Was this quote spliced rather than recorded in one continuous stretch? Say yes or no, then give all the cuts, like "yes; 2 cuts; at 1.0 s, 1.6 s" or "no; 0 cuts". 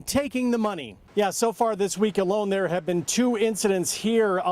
yes; 1 cut; at 0.9 s